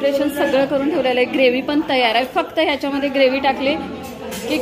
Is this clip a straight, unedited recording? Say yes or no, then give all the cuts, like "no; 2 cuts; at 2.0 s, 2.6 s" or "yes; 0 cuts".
yes; 0 cuts